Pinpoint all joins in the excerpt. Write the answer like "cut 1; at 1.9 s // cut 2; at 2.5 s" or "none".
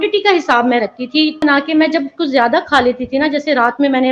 cut 1; at 1.4 s